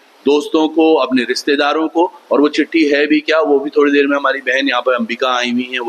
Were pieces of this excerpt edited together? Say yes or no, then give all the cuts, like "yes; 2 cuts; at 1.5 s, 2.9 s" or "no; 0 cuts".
no; 0 cuts